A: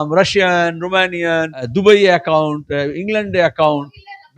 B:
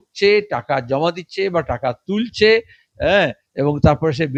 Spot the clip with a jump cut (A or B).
A